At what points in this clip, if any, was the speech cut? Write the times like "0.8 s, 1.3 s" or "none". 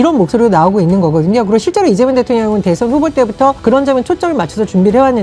3.6 s